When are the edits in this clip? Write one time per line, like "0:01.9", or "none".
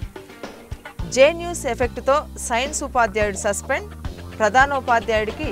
0:01.1